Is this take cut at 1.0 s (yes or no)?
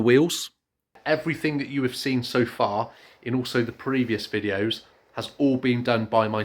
yes